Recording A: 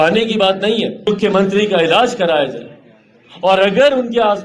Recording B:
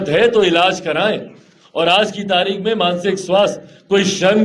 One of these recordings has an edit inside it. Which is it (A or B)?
A